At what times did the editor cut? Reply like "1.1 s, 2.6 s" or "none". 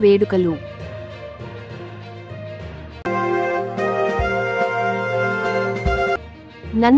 none